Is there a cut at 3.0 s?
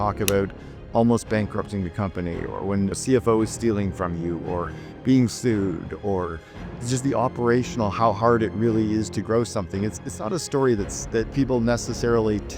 yes; 1 cut; at 3.0 s

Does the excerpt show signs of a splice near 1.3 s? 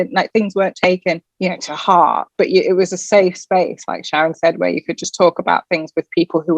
yes; 1 cut; at 1.3 s

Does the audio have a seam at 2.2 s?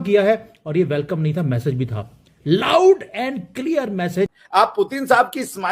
no; 1 cut; at 4.4 s

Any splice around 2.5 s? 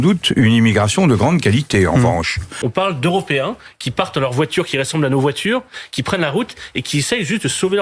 yes; 1 cut; at 2.5 s

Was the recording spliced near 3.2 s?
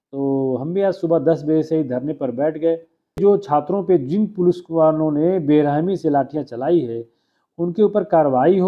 yes; 1 cut; at 3.2 s

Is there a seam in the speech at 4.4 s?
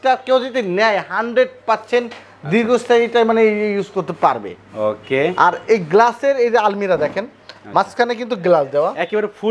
no; 0 cuts

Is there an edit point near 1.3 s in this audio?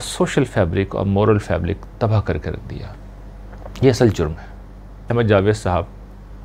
no; 1 cut; at 5.1 s

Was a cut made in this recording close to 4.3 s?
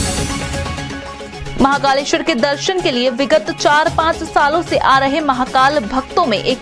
no; 1 cut; at 1.3 s

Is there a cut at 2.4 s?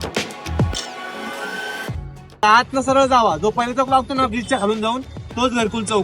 yes; 1 cut; at 2.4 s

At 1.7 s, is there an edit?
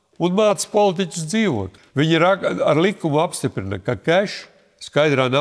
yes; 1 cut; at 1.7 s

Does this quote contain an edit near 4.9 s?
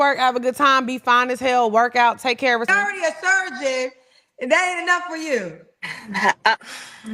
no; 1 cut; at 2.7 s

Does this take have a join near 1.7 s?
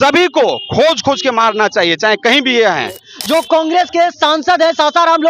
no; 1 cut; at 3.1 s

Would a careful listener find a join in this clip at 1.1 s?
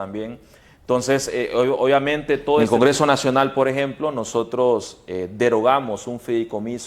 no; 1 cut; at 2.7 s

